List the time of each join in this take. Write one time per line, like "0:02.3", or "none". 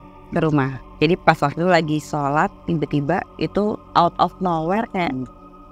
0:02.6